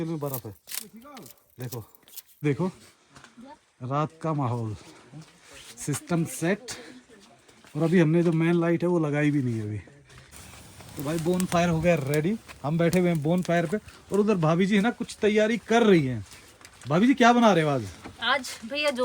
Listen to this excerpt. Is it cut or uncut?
cut